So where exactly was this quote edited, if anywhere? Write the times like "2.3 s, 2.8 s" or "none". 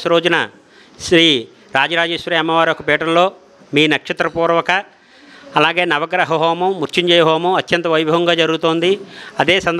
none